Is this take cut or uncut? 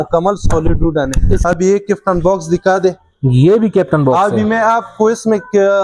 cut